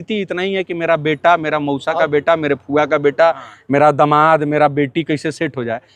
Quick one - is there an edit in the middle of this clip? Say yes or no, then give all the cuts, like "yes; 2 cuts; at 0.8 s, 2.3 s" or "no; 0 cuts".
no; 0 cuts